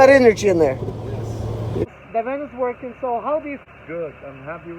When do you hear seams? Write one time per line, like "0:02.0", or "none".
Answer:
0:01.9
0:03.6

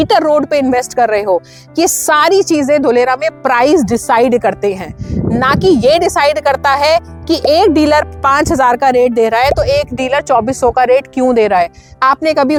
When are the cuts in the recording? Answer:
none

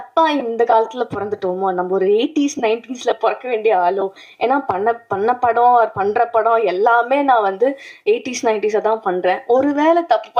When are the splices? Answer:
none

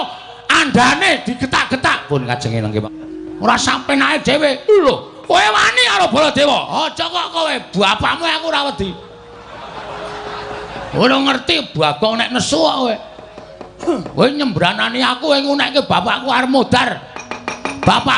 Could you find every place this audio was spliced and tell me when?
0:02.8

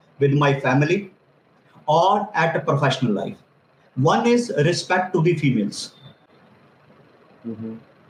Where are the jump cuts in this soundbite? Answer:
none

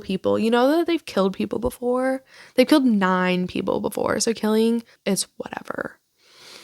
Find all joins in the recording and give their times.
0:04.9

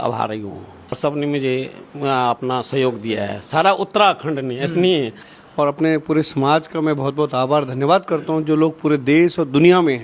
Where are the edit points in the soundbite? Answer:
0:01.0
0:05.2

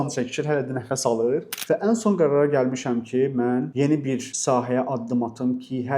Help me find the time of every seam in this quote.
0:01.6

